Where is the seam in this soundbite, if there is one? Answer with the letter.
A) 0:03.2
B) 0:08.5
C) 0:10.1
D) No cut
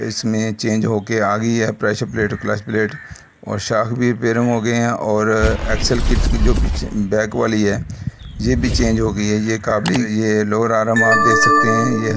C